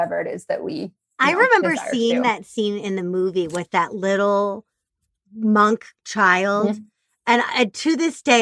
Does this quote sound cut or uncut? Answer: uncut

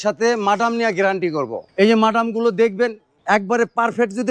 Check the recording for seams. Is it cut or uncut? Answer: cut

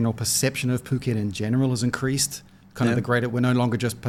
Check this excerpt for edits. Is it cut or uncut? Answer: uncut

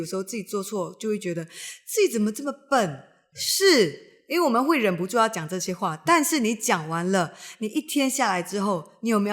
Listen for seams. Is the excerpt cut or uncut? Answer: uncut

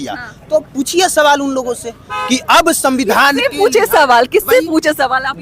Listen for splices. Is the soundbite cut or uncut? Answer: uncut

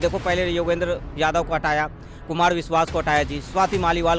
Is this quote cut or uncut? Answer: uncut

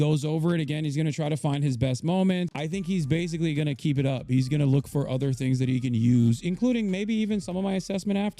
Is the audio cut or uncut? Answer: cut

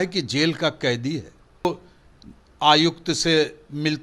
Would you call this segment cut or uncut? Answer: cut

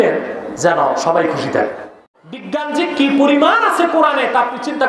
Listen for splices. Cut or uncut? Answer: cut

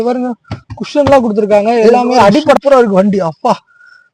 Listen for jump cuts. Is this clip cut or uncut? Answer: cut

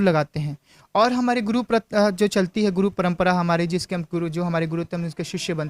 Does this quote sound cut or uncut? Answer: uncut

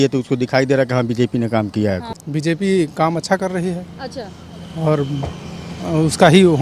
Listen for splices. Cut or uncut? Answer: cut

